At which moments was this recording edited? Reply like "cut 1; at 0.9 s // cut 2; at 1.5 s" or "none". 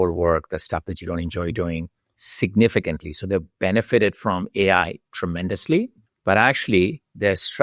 cut 1; at 6.0 s